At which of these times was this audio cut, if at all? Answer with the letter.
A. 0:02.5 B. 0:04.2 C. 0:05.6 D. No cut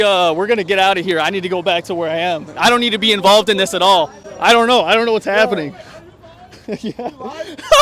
D